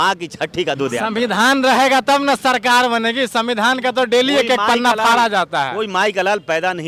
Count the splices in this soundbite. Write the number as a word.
zero